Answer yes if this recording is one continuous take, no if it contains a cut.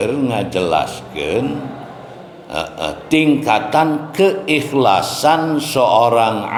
yes